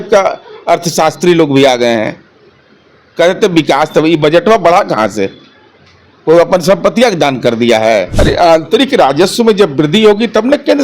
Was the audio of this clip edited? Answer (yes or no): yes